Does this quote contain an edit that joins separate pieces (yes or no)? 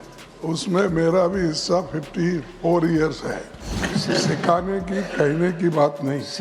yes